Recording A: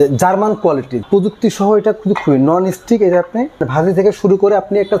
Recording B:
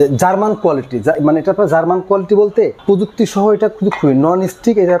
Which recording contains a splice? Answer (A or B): A